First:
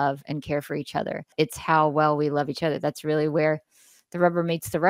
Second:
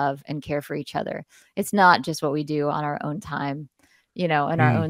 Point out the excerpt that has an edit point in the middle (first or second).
first